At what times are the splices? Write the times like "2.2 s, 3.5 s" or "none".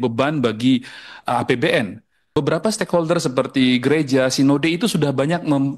2.3 s